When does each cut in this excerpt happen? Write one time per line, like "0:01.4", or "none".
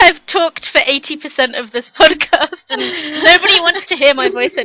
none